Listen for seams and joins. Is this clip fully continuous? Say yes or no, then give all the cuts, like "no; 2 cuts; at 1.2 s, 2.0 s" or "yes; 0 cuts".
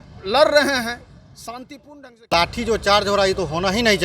no; 1 cut; at 2.3 s